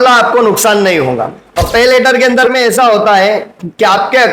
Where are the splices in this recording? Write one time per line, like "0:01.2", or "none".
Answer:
0:01.4